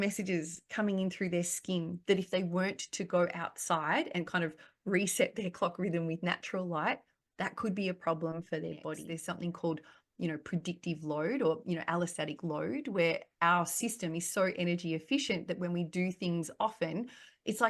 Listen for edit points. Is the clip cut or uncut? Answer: cut